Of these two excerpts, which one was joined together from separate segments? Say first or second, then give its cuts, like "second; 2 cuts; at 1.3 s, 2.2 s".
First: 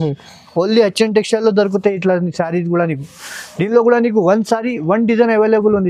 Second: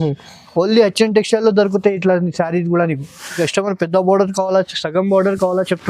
second; 1 cut; at 3.4 s